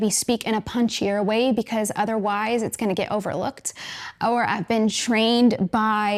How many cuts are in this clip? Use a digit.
0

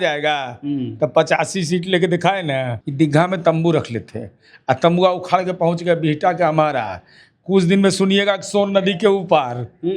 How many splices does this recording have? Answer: 1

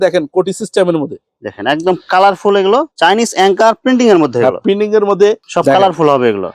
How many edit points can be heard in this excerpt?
2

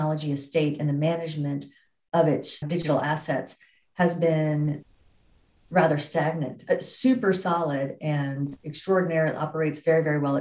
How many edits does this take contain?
1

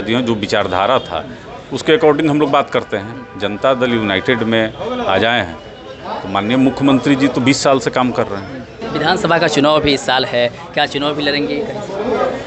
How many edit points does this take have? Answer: 1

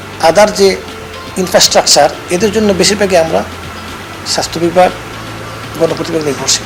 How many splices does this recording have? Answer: 0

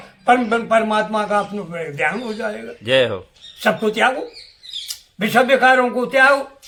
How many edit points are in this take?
0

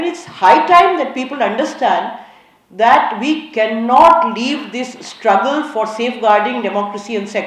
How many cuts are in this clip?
0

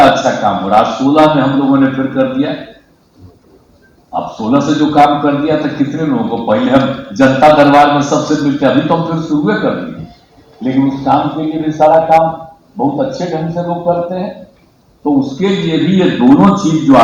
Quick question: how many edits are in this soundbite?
0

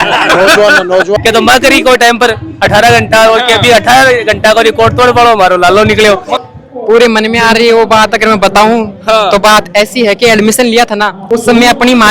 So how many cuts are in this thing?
2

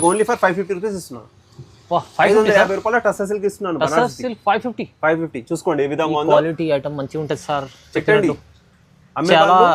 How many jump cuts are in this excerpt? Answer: 0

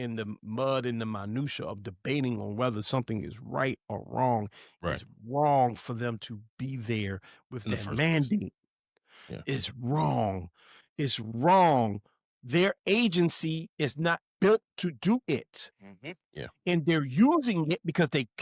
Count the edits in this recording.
0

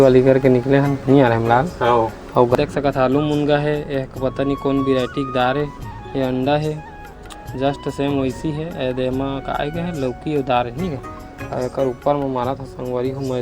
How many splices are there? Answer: 1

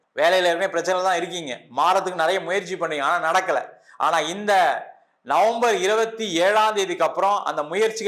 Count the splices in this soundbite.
0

